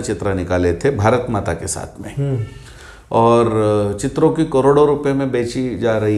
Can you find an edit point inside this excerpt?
no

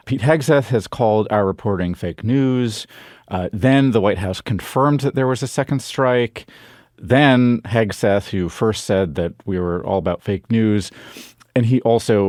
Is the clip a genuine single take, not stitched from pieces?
yes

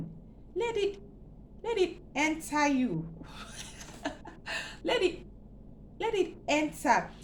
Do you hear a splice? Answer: no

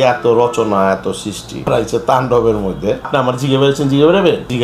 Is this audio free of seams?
no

